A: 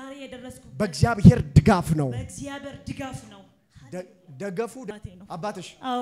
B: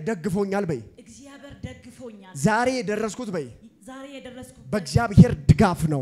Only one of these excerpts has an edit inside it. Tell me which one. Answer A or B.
A